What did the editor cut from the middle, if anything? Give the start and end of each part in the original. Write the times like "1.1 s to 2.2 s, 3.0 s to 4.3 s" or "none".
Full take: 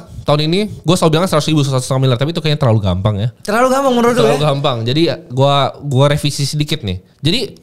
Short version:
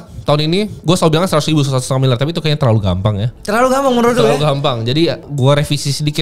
5.3 s to 5.8 s